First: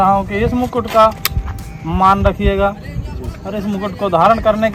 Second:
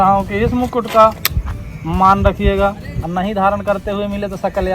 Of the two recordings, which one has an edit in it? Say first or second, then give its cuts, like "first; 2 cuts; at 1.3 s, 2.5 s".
second; 1 cut; at 2.9 s